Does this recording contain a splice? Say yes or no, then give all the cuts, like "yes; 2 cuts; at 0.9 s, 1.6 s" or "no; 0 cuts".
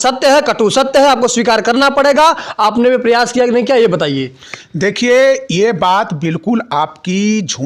no; 0 cuts